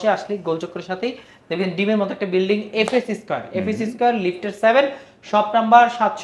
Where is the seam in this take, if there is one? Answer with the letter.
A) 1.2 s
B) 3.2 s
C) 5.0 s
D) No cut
D